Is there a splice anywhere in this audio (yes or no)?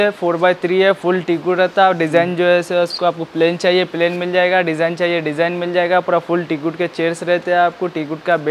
no